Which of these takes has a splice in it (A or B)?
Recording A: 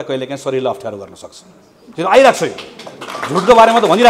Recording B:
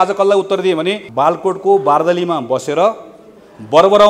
B